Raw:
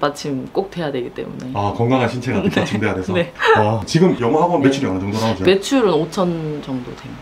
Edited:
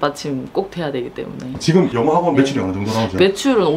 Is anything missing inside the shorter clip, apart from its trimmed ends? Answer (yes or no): yes